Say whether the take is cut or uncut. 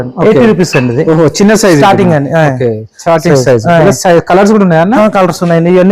uncut